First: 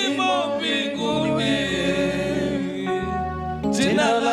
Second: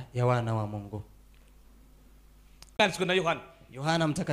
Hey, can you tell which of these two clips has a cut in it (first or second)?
second